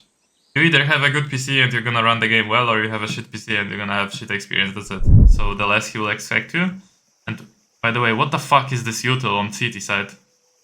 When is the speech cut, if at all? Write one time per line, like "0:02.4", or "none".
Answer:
0:05.3